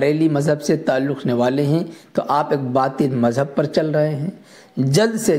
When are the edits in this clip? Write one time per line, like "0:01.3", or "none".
none